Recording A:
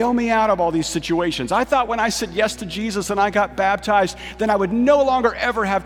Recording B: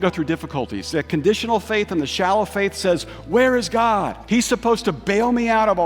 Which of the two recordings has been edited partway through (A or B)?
B